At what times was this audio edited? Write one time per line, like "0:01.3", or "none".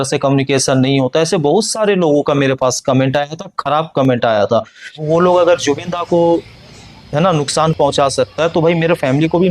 0:05.0

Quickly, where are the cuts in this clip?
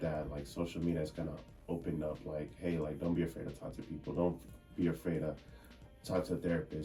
none

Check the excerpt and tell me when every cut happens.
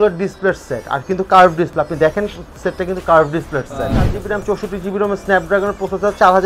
0:04.2

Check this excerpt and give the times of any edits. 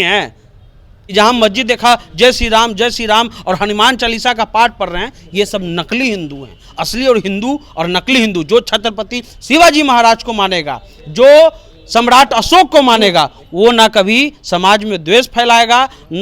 0:01.0

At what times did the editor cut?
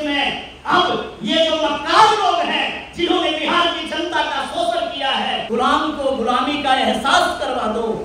0:05.4

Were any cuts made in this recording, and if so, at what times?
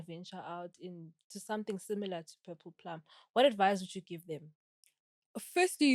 none

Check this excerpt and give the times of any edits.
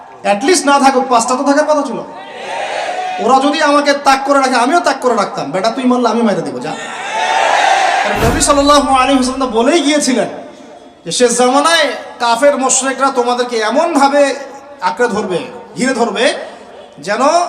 0:08.1

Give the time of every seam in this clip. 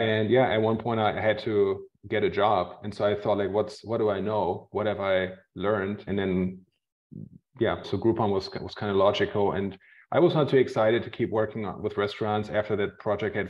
0:06.1
0:07.9

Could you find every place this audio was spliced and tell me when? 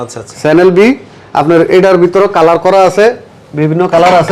none

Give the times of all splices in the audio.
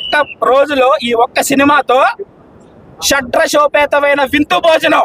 none

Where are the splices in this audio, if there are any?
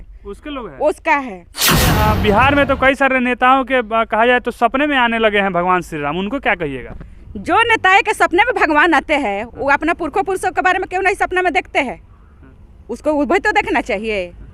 0:01.9

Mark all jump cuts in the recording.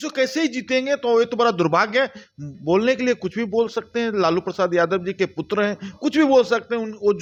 none

